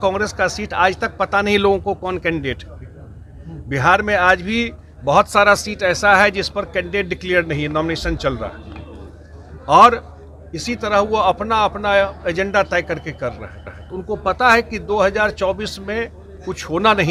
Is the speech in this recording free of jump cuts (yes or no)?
yes